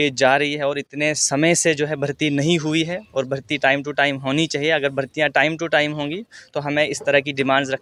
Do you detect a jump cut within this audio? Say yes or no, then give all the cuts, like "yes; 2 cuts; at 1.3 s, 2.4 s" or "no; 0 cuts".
no; 0 cuts